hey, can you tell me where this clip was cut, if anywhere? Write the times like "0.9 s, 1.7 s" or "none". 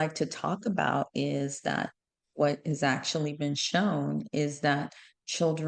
none